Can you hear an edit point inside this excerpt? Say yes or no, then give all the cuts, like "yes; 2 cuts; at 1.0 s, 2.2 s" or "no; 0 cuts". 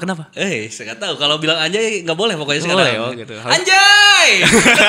no; 0 cuts